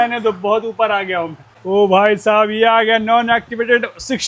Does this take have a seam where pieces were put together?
yes; 1 cut; at 1.6 s

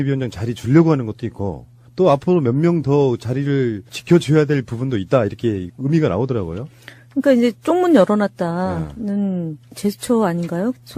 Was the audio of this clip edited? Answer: no; 0 cuts

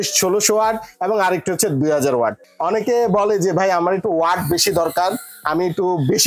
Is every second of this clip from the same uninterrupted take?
no; 1 cut; at 2.4 s

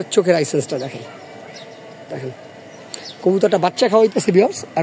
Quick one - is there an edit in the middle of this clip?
no; 0 cuts

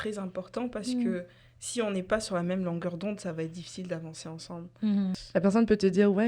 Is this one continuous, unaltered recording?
no; 1 cut; at 5.2 s

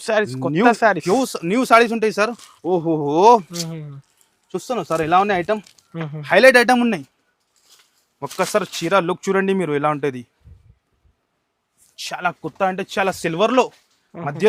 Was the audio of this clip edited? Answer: no; 0 cuts

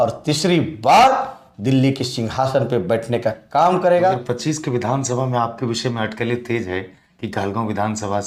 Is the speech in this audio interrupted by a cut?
yes; 1 cut; at 4.2 s

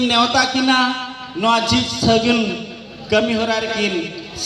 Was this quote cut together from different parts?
no; 0 cuts

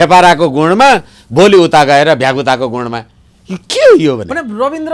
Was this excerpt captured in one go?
yes; 0 cuts

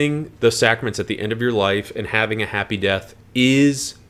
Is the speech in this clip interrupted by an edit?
no; 0 cuts

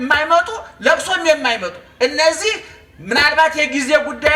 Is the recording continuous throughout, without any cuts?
yes; 0 cuts

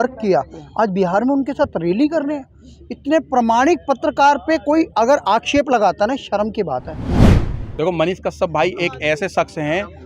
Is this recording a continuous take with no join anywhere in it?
no; 1 cut; at 7.3 s

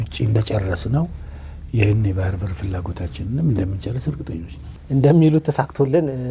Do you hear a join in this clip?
no; 0 cuts

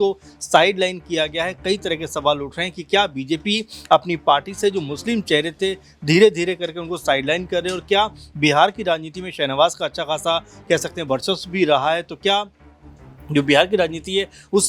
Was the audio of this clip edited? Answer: no; 0 cuts

